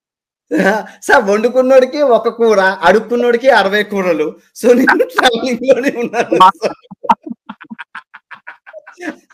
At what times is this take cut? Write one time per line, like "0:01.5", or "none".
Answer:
none